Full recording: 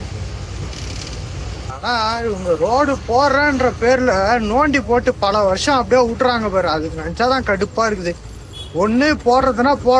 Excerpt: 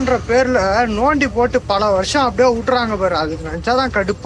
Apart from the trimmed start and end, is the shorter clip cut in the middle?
no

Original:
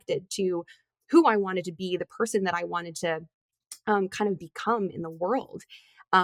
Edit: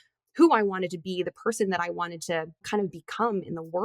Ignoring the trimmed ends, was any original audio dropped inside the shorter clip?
yes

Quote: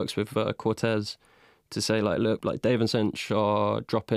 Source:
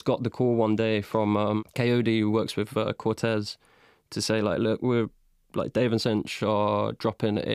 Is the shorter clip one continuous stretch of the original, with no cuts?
no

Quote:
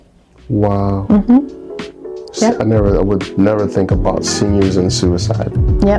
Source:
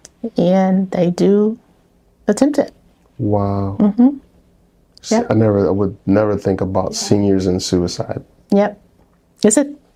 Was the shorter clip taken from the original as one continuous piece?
yes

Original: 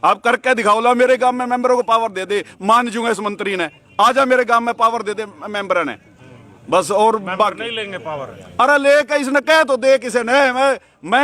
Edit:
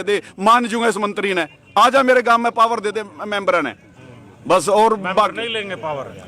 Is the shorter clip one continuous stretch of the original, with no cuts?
yes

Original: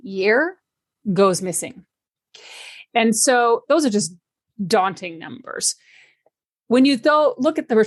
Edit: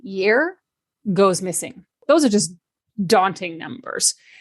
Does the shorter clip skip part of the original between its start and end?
yes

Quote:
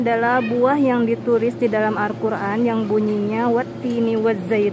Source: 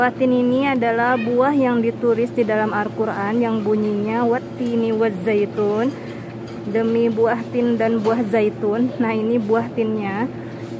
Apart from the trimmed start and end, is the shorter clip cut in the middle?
no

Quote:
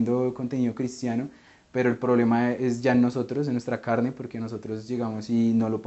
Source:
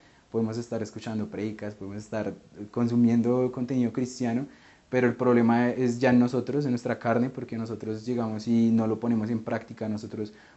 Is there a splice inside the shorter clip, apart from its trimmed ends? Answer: no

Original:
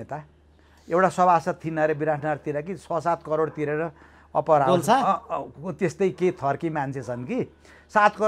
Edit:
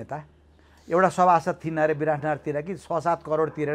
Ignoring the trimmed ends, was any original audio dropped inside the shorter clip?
no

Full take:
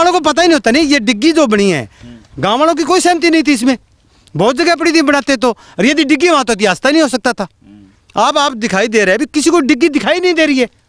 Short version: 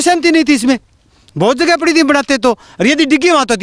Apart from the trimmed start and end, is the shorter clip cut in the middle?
no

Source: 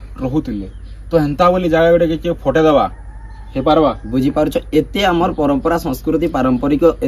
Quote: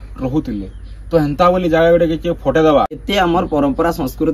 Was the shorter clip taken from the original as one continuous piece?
no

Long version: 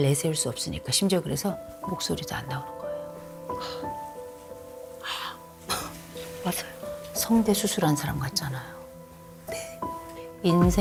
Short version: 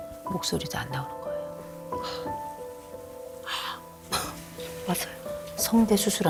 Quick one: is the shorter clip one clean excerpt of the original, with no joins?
yes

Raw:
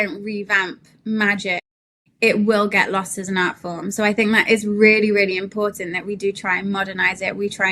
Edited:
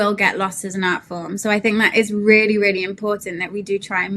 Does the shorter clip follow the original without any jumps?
yes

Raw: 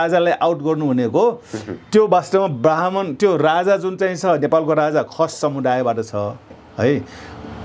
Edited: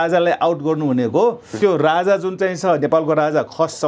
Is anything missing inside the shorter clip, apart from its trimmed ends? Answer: yes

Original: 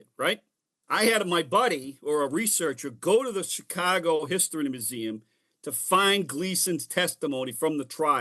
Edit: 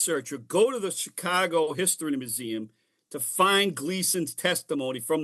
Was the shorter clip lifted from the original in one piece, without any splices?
yes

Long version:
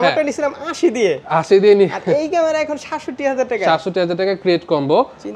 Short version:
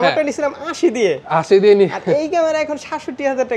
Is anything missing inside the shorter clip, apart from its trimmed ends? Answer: no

